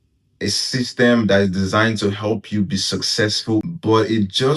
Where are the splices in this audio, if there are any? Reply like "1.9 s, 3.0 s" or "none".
3.6 s